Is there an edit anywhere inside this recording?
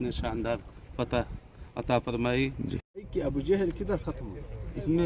yes; 1 cut; at 3.1 s

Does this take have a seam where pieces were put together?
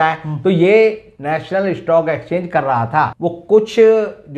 yes; 1 cut; at 3.1 s

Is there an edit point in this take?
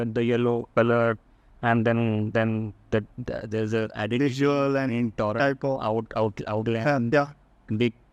no; 0 cuts

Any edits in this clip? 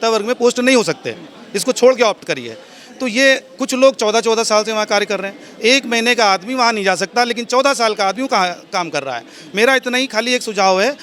no; 0 cuts

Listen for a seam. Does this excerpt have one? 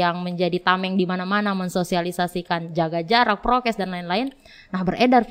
no; 0 cuts

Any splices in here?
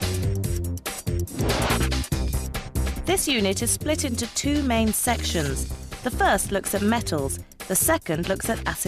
no; 0 cuts

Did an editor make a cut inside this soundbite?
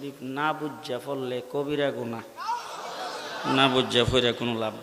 no; 0 cuts

